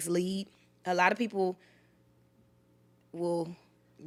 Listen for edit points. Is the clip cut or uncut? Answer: uncut